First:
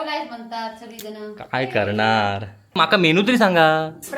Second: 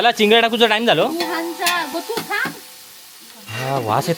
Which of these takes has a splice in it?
first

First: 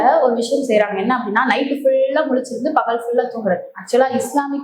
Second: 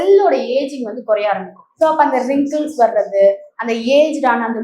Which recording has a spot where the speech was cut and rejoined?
second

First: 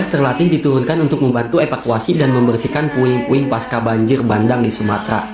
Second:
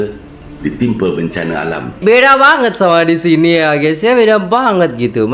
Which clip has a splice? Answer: second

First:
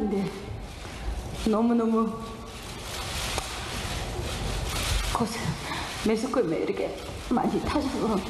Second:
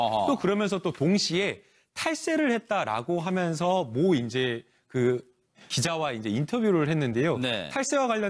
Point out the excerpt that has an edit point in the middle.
second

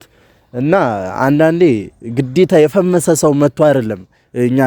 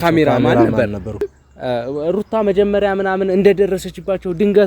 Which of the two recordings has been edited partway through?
second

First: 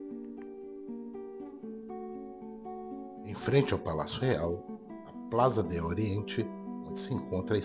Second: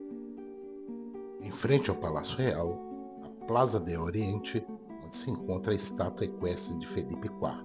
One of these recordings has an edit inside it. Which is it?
second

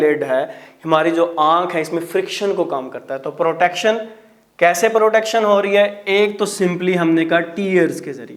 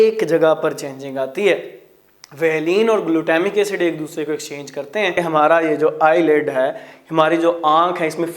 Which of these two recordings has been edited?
second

